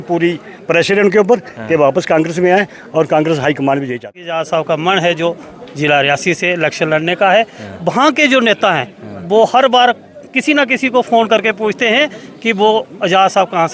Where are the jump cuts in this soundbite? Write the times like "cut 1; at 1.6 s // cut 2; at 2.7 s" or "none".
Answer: cut 1; at 4.2 s

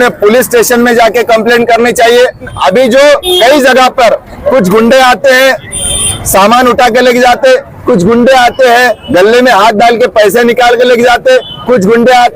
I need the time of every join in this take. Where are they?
cut 1; at 2.5 s

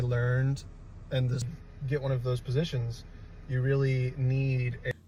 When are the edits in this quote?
none

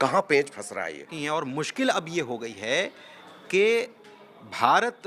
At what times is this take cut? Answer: cut 1; at 1.1 s

